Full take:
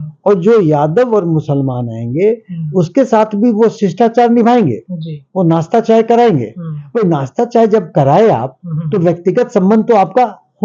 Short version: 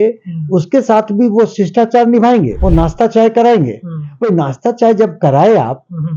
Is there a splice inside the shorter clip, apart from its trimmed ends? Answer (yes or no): yes